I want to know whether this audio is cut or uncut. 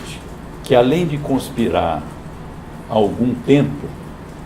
cut